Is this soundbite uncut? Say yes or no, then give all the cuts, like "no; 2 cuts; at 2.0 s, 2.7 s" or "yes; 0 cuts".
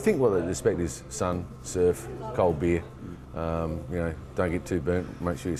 yes; 0 cuts